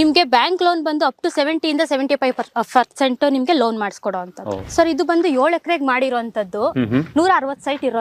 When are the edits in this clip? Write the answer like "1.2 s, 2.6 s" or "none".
4.6 s

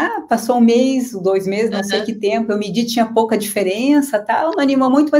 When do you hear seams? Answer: none

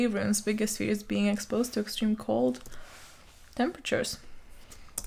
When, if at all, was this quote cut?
none

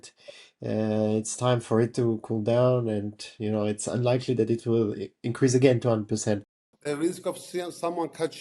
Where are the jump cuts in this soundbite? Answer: 6.8 s

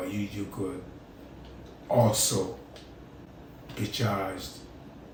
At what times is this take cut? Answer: none

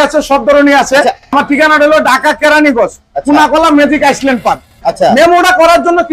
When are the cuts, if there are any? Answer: 1.3 s, 4.7 s

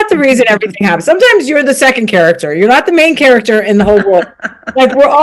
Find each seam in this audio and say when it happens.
none

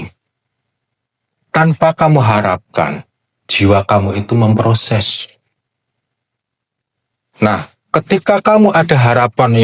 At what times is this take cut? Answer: none

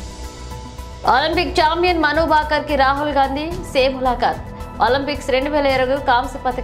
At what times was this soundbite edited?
1.0 s

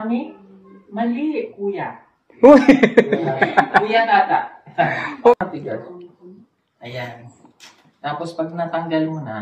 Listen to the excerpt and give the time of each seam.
5.3 s

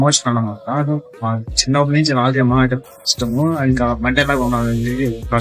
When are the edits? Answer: none

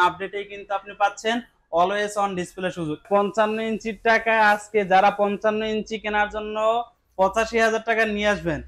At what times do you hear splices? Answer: 3.0 s

